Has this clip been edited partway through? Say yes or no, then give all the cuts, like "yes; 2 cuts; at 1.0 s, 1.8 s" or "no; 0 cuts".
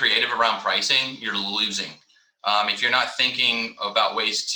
no; 0 cuts